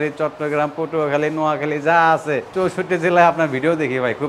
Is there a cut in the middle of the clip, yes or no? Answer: yes